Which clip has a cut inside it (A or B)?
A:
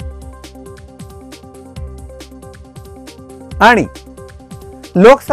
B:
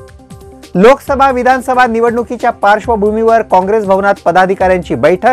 A